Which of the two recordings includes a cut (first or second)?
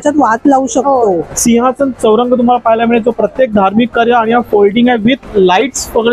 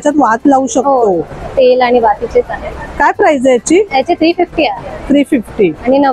first